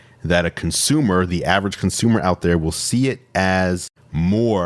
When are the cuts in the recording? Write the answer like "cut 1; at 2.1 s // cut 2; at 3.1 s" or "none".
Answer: none